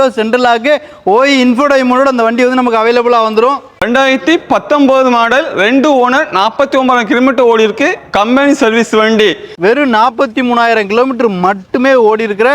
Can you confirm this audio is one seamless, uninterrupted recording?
no; 2 cuts; at 3.7 s, 9.5 s

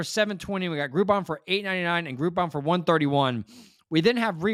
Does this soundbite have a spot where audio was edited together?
no; 0 cuts

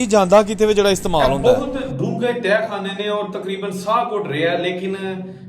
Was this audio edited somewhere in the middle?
yes; 1 cut; at 1.3 s

